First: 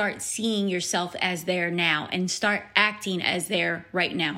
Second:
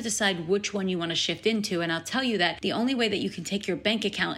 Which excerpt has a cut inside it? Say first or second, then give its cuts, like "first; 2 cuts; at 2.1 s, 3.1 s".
second; 1 cut; at 2.6 s